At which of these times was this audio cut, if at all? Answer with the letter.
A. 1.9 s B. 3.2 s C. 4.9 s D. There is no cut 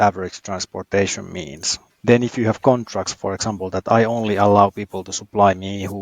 A